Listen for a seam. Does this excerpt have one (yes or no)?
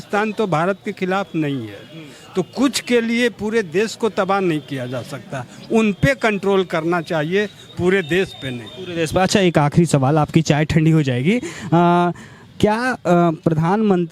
no